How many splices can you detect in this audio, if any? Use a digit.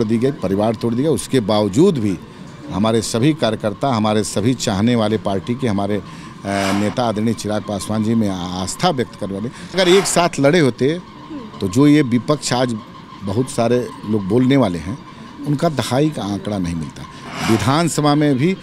2